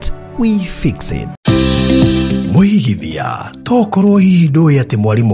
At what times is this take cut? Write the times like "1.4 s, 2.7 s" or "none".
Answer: 1.3 s